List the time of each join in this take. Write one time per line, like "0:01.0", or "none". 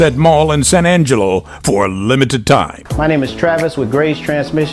0:02.8